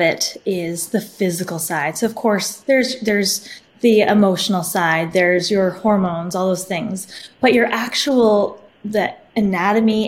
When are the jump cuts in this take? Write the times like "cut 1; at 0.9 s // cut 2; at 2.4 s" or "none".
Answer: none